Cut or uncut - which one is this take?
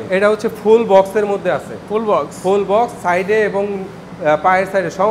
uncut